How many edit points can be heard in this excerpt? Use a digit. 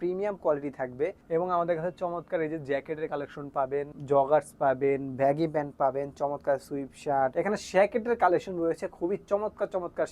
3